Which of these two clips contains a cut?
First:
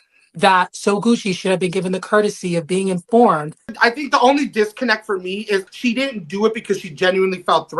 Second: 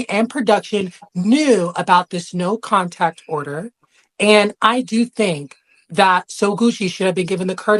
first; 2 cuts; at 3.7 s, 5.7 s

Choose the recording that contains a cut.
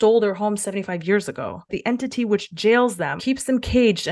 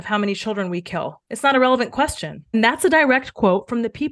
first; 2 cuts; at 1.7 s, 3.2 s

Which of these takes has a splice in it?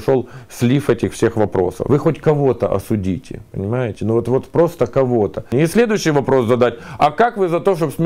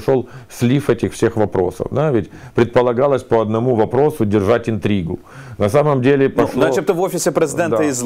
first; 2 cuts; at 1.8 s, 5.5 s

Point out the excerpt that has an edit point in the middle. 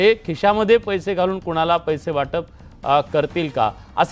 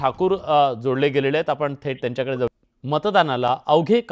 second; 1 cut; at 2.5 s

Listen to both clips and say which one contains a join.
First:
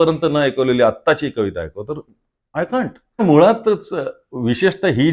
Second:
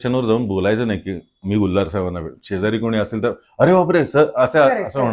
first; 1 cut; at 3.2 s

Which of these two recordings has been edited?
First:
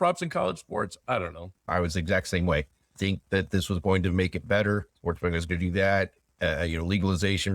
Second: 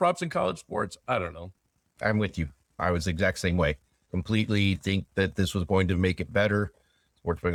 first; 3 cuts; at 1.5 s, 2.9 s, 4.9 s

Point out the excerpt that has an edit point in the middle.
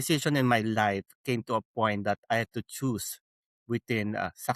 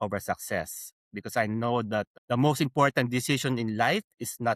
second; 1 cut; at 2.1 s

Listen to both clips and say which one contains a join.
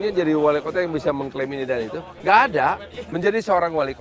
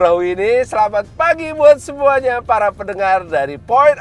first; 2 cuts; at 2.1 s, 2.9 s

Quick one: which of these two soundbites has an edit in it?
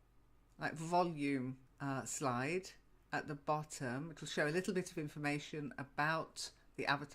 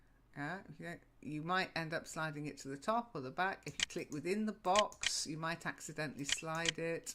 first; 1 cut; at 5.8 s

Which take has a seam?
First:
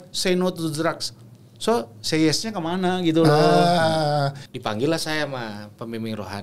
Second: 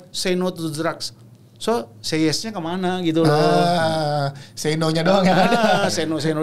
first; 1 cut; at 4.4 s

